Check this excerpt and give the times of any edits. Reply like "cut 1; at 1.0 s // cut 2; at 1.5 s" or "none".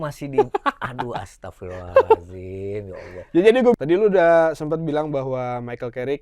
cut 1; at 3.7 s